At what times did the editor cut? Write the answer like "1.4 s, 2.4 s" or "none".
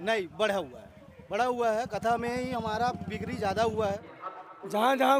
4.2 s